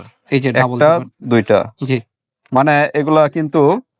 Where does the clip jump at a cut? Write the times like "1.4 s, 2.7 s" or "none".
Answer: none